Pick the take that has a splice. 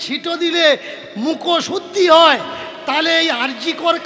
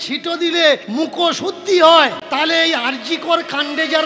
second; 2 cuts; at 0.9 s, 2.2 s

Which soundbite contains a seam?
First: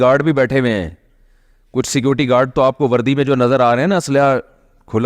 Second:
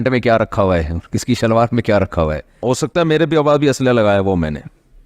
second; 1 cut; at 2.6 s

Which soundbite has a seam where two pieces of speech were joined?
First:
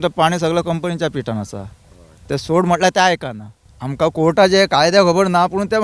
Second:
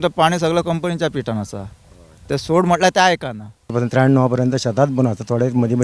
second; 1 cut; at 3.7 s

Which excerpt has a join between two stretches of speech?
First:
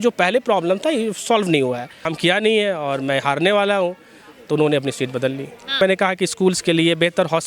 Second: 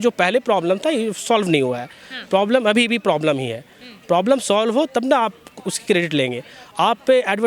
first; 2 cuts; at 2.1 s, 5.8 s

